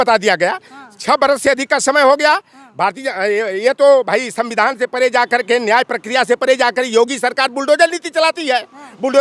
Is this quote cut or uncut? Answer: uncut